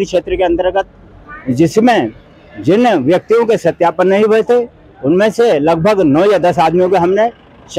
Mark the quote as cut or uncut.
uncut